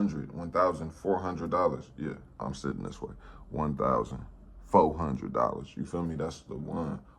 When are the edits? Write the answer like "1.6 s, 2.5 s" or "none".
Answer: 2.4 s